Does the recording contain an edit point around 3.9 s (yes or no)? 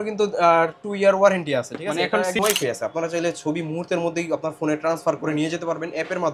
no